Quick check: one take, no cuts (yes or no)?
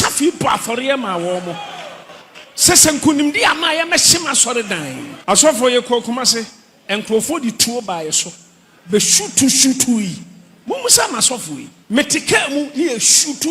no